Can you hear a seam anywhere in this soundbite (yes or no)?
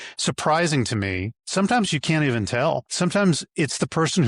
yes